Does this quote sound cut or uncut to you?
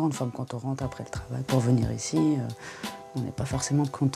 uncut